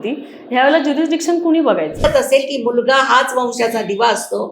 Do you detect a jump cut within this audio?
yes; 1 cut; at 2.0 s

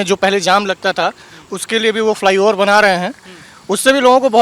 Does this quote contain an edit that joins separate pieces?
no; 0 cuts

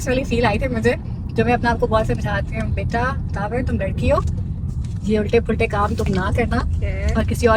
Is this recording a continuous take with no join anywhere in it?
yes; 0 cuts

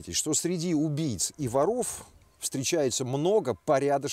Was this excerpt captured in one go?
yes; 0 cuts

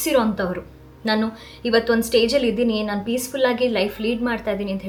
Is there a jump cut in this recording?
no; 0 cuts

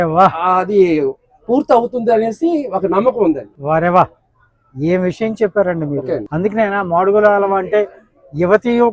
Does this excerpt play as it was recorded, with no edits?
no; 2 cuts; at 3.5 s, 6.3 s

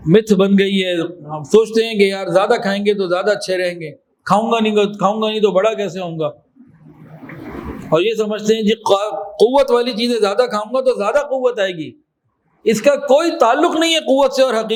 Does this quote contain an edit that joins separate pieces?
no; 0 cuts

